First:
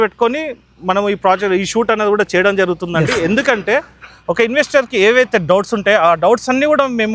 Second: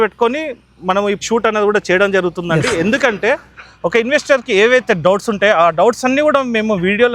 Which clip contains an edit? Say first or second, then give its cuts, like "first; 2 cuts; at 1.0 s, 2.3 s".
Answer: second; 1 cut; at 1.2 s